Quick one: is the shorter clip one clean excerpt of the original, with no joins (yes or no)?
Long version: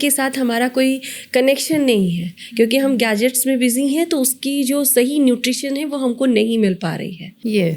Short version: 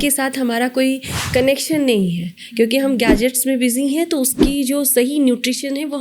yes